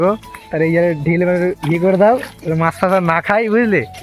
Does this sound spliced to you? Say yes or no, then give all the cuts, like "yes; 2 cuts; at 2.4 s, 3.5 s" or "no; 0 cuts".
no; 0 cuts